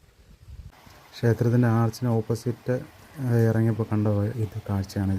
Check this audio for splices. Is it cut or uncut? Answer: cut